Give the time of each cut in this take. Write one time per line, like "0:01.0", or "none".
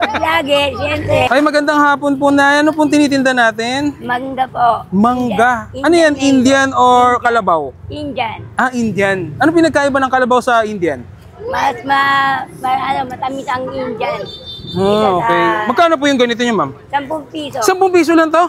0:01.3